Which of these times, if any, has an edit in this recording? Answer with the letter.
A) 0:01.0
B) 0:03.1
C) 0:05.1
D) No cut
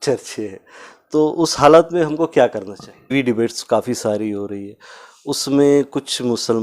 B